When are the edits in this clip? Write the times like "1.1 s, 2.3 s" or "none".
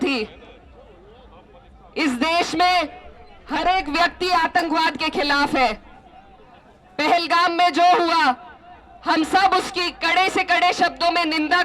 none